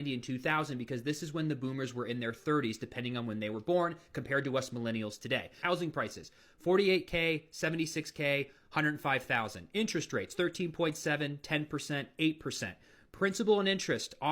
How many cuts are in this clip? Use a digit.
1